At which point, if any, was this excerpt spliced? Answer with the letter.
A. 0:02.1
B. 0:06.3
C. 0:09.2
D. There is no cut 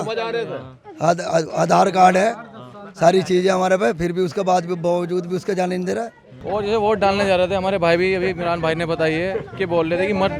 B